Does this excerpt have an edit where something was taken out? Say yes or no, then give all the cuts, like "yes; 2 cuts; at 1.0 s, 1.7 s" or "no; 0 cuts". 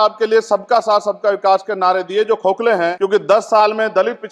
yes; 1 cut; at 2.9 s